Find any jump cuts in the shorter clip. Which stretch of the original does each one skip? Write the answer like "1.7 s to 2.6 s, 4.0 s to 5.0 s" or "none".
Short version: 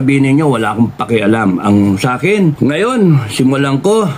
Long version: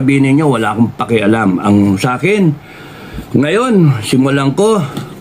2.6 s to 3.3 s